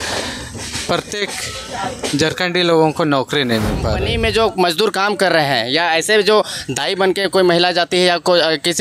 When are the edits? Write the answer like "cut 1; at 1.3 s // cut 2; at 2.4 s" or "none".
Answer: cut 1; at 4.1 s